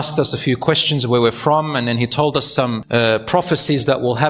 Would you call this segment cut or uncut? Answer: cut